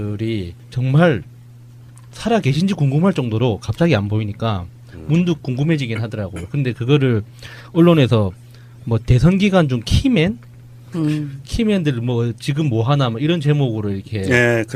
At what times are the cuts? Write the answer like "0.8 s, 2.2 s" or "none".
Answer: 10.2 s